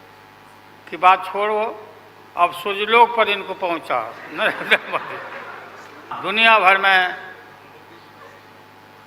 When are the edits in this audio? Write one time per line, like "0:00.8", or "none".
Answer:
0:06.2